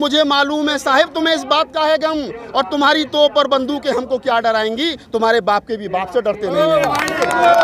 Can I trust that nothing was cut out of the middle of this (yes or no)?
yes